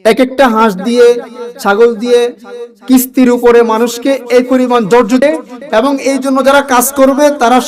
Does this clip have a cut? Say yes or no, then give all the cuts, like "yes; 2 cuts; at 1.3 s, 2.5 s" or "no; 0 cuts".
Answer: yes; 1 cut; at 5.2 s